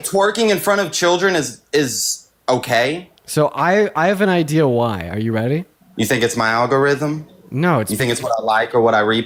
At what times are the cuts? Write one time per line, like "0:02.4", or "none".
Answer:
none